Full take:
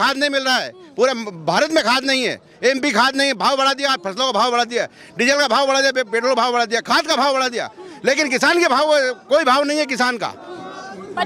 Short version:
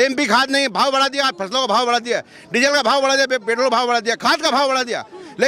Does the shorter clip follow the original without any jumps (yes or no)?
yes